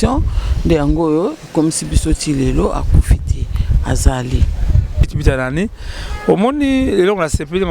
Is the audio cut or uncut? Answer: cut